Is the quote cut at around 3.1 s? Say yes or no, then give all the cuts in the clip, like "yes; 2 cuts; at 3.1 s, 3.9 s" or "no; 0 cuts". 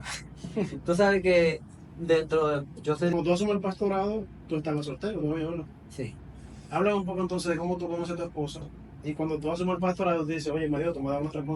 yes; 1 cut; at 3.1 s